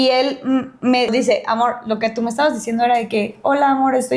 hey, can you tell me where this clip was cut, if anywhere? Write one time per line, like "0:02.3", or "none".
0:01.1